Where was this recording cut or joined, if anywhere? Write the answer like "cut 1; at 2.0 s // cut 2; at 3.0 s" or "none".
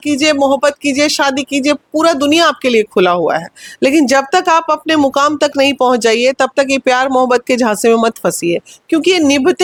none